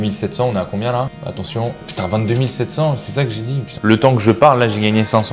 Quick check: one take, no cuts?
no; 2 cuts; at 1.2 s, 3.8 s

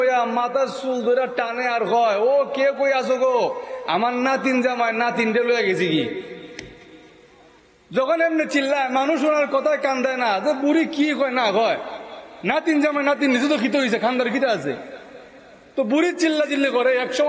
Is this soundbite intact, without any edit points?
yes; 0 cuts

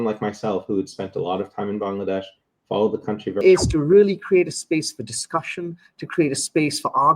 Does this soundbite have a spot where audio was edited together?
yes; 1 cut; at 3.4 s

